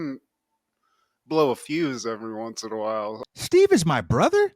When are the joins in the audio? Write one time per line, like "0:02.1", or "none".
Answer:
0:03.2